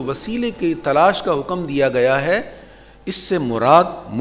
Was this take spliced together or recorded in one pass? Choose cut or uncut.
uncut